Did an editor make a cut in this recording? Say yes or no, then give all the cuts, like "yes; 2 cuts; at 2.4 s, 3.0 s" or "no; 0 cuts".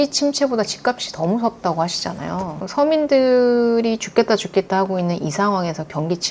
no; 0 cuts